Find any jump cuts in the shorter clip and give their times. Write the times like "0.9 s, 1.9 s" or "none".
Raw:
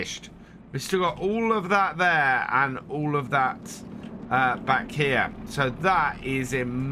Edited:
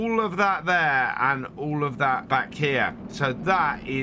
2.2 s